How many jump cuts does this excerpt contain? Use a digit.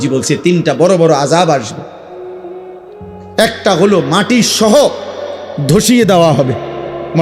2